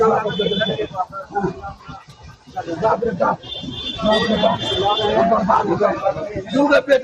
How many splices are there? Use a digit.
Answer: 0